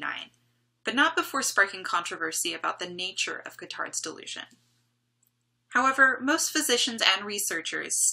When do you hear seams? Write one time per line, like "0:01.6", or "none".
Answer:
none